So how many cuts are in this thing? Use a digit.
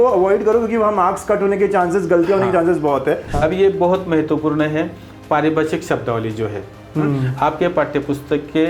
1